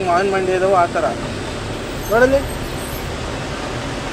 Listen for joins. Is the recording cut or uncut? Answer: uncut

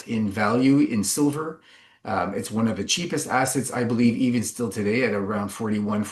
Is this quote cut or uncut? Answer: uncut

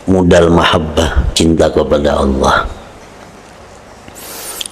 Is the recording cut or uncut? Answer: cut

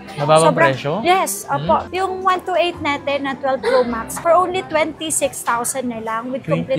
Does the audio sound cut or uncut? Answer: uncut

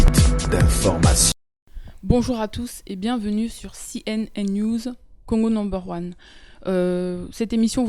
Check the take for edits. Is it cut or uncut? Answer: uncut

